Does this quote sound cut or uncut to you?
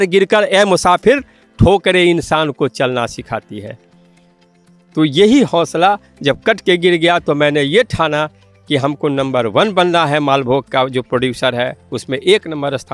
uncut